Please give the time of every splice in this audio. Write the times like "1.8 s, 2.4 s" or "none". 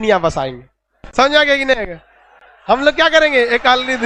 none